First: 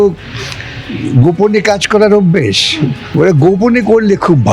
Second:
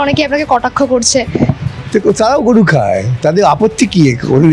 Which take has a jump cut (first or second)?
first